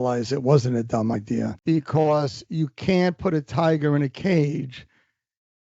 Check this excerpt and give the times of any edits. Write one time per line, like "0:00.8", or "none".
0:01.6